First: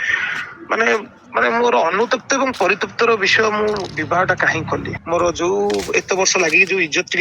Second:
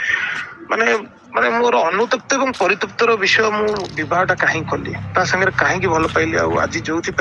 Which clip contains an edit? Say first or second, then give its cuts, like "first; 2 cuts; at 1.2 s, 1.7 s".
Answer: first; 1 cut; at 4.9 s